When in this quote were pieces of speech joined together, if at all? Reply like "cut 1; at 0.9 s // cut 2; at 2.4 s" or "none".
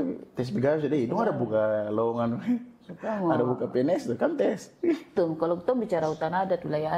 cut 1; at 5.1 s